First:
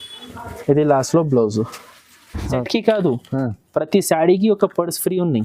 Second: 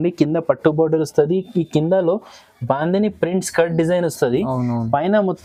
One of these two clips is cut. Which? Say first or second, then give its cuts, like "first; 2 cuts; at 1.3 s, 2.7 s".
first; 1 cut; at 2.7 s